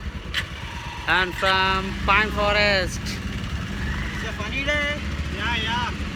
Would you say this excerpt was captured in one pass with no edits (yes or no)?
yes